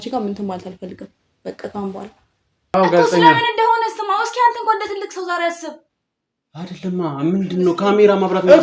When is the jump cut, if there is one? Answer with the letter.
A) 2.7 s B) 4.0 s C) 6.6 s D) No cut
A